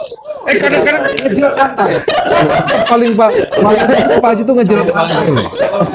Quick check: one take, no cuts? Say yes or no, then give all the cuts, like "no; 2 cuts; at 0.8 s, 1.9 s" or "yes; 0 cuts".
yes; 0 cuts